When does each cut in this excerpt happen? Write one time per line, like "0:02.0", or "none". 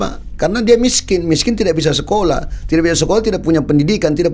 none